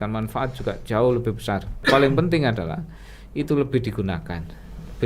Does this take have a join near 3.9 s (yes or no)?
no